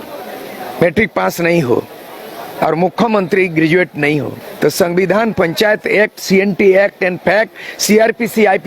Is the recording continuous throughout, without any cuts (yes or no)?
no